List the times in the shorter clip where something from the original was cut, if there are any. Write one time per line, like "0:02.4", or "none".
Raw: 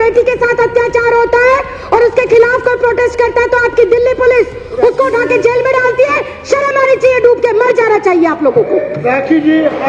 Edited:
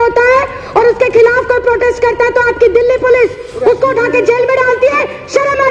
none